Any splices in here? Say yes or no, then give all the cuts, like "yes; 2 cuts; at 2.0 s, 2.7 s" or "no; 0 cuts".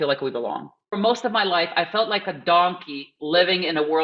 yes; 1 cut; at 0.9 s